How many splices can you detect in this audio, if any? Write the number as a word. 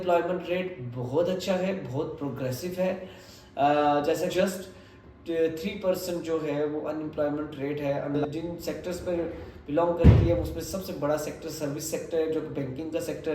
two